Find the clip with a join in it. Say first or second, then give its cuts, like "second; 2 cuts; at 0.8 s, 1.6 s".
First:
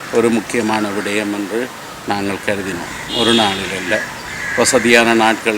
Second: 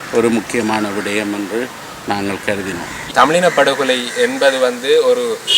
second; 1 cut; at 3.1 s